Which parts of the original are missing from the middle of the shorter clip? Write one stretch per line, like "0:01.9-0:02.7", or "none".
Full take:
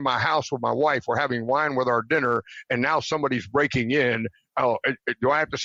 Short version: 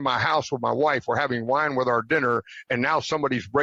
none